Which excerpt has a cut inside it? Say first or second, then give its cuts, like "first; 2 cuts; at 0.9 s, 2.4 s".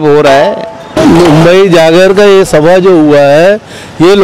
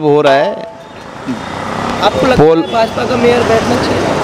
first; 1 cut; at 1.0 s